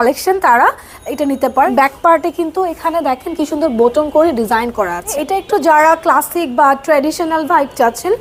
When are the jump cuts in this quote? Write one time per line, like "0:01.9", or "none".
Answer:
0:01.7
0:05.1